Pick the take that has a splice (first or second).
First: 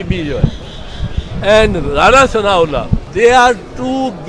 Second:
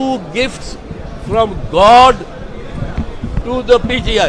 first